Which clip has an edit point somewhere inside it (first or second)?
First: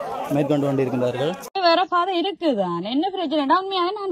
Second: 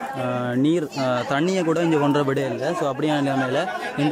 first